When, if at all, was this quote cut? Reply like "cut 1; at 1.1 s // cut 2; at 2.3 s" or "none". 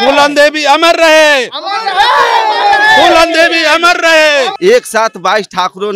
cut 1; at 4.5 s